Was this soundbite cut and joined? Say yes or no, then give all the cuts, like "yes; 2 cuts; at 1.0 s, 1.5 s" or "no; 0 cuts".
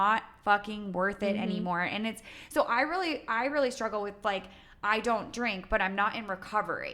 no; 0 cuts